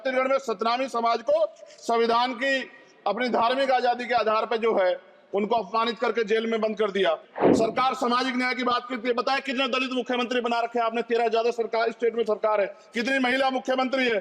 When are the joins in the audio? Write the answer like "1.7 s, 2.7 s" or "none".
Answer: 7.3 s